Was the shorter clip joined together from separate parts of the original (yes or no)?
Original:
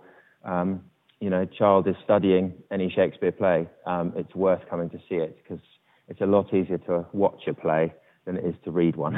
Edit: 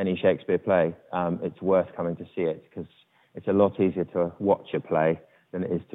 no